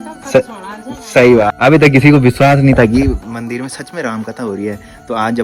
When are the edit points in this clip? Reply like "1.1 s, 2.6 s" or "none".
1.5 s